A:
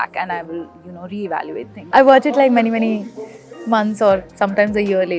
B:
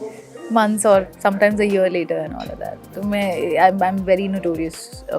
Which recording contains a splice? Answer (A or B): A